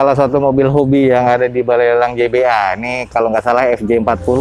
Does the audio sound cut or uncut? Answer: uncut